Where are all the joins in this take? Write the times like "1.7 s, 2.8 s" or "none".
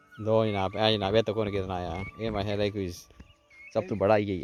none